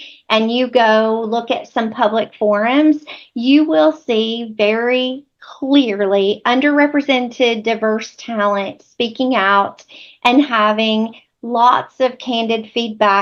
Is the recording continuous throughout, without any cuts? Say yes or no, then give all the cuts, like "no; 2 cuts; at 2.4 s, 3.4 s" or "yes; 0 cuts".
yes; 0 cuts